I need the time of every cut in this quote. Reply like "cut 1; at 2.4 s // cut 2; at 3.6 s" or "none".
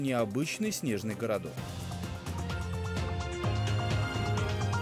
cut 1; at 1.5 s